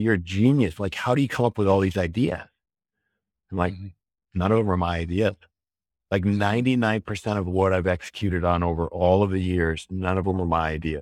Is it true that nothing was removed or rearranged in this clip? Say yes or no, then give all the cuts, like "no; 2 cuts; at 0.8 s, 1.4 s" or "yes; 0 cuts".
yes; 0 cuts